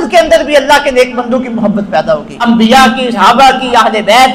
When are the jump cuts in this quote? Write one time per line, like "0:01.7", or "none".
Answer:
0:02.3
0:03.1